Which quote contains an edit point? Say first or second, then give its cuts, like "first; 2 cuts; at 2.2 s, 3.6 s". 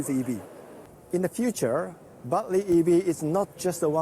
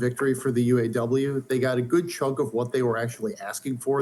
first; 1 cut; at 0.9 s